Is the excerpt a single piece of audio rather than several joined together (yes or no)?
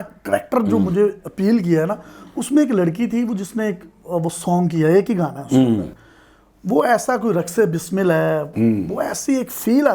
yes